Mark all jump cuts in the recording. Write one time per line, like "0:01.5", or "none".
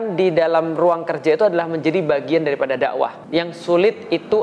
0:03.2

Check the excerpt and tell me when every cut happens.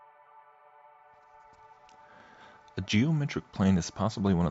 0:01.1

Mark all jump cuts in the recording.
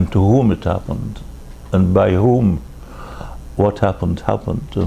0:02.0

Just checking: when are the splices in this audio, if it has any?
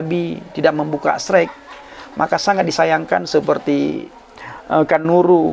0:04.2

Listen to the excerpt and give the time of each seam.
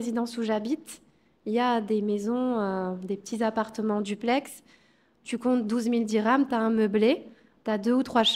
none

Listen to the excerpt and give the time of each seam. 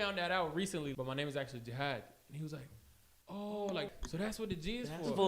0:00.9
0:03.9

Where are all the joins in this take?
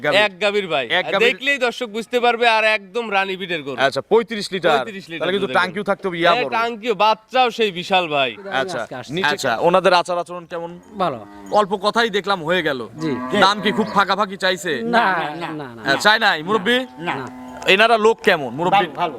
0:09.0

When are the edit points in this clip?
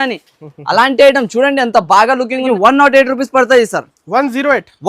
0:02.4

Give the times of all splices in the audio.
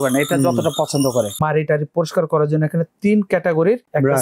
0:01.4

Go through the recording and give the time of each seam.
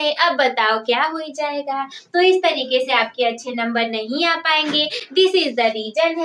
none

